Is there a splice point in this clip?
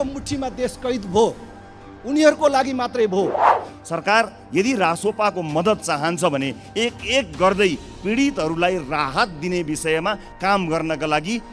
yes; 1 cut; at 3.7 s

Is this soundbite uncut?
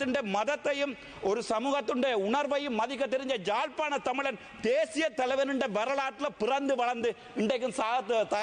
yes; 0 cuts

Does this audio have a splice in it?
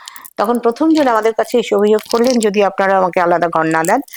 no; 0 cuts

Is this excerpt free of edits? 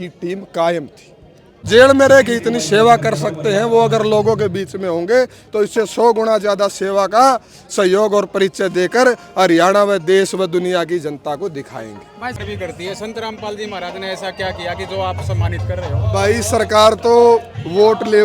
no; 2 cuts; at 1.7 s, 12.4 s

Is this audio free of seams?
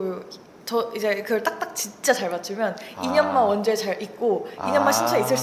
yes; 0 cuts

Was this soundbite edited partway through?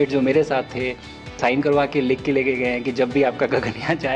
yes; 1 cut; at 1.4 s

